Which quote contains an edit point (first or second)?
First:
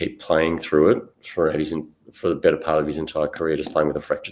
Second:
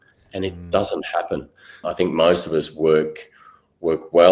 second